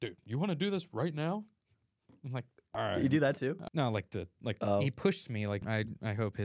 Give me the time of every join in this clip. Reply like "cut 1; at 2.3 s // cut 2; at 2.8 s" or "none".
cut 1; at 2.6 s // cut 2; at 3.6 s // cut 3; at 5.6 s